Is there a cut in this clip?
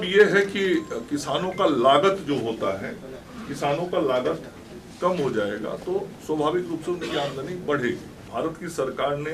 yes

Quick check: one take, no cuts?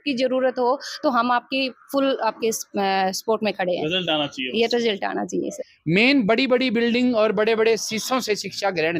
no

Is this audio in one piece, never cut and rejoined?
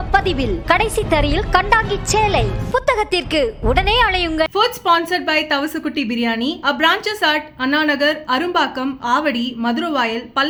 yes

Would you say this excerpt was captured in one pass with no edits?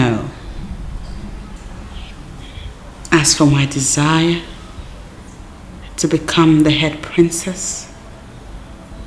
no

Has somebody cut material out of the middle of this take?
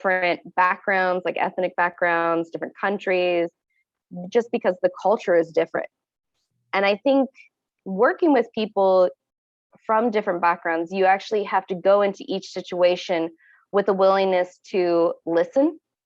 no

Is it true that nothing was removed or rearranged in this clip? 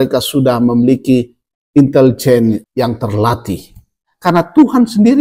no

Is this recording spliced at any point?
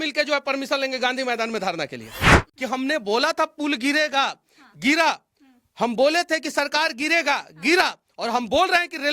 yes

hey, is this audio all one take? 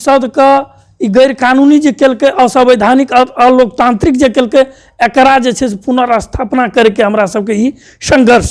yes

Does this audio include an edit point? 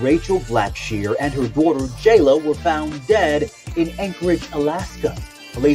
no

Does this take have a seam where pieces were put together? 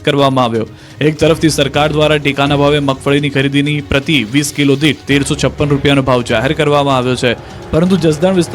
yes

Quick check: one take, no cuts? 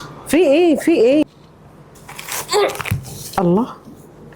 no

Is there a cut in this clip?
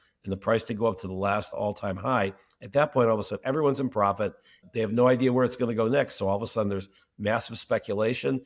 yes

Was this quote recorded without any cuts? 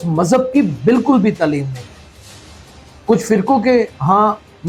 yes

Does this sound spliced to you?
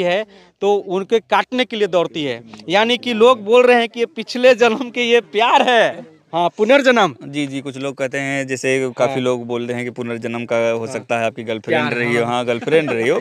yes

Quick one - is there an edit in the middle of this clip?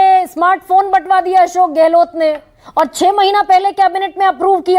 no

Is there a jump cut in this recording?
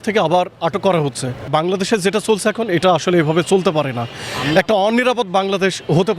yes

